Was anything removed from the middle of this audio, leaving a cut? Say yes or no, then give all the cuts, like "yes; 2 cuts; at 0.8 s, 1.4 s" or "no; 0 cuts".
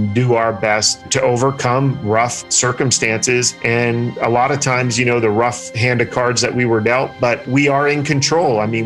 yes; 2 cuts; at 1.1 s, 4.0 s